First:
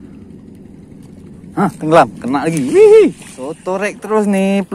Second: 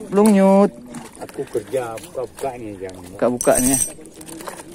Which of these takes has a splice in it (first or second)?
first